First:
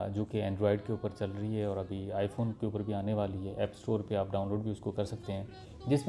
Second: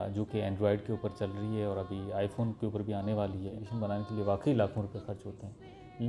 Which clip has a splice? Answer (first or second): second